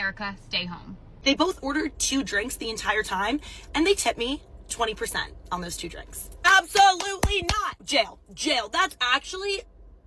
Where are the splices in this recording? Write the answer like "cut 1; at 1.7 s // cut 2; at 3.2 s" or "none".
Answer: cut 1; at 1.1 s // cut 2; at 7.8 s